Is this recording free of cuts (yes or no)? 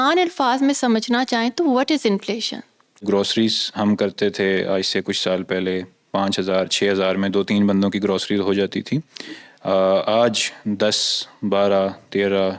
no